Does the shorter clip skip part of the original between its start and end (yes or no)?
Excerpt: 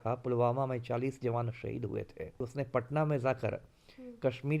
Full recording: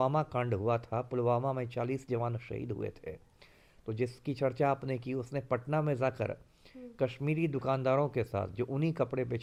yes